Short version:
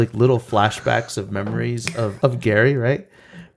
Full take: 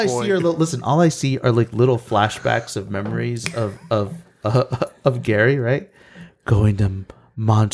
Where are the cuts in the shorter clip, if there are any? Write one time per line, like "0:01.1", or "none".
0:02.1